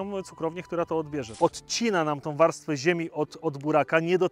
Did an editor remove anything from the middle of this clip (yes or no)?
yes